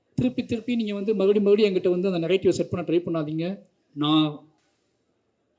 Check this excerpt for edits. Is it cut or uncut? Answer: uncut